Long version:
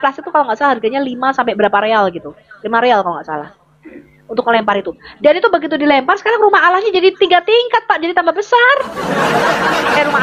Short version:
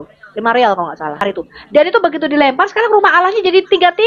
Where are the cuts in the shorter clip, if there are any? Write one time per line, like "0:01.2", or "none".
0:01.2